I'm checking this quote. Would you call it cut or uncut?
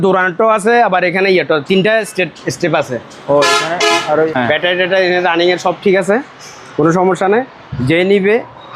cut